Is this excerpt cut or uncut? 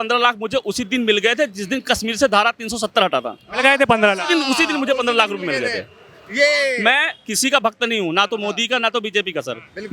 uncut